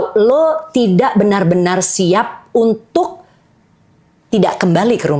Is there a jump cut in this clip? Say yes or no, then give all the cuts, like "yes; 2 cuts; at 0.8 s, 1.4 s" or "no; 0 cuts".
no; 0 cuts